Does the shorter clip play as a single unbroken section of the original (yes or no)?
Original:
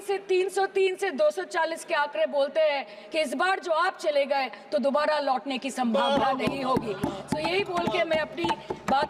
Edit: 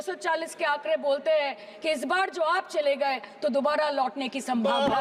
yes